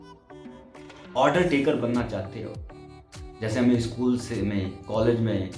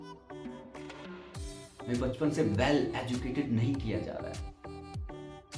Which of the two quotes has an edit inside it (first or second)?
first